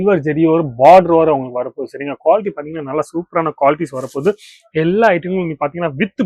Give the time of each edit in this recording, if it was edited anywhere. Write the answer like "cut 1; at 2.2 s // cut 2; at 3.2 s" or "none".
none